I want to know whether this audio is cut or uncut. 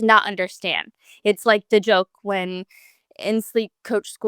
uncut